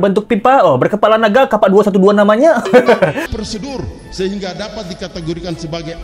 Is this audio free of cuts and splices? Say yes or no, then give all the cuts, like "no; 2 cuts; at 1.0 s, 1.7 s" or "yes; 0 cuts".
no; 1 cut; at 3.2 s